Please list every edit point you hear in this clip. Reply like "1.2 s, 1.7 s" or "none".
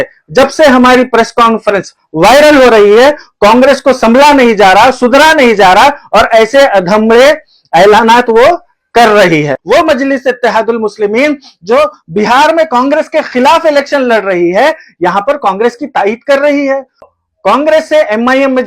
9.6 s, 17.1 s